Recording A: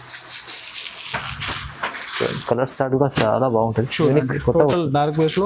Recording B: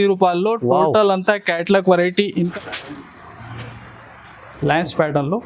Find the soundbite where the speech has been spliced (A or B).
B